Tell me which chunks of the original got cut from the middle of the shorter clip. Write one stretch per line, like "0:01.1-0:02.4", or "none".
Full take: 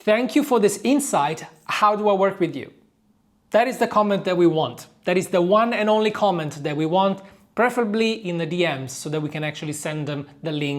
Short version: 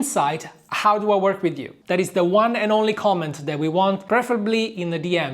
0:02.7-0:04.9
0:07.2-0:07.5